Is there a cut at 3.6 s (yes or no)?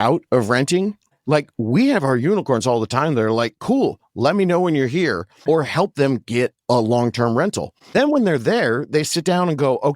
no